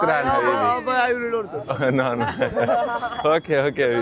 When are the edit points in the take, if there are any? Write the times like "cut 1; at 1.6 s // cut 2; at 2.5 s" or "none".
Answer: none

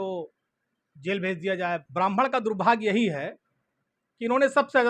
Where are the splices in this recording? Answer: cut 1; at 1.8 s

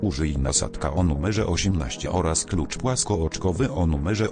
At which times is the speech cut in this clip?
none

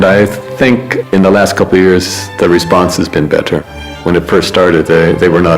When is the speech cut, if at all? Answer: cut 1; at 1.0 s // cut 2; at 4.0 s

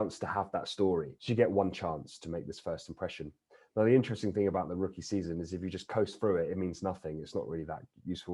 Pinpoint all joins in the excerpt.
cut 1; at 1.2 s

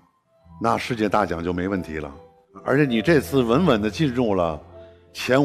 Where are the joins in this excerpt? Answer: none

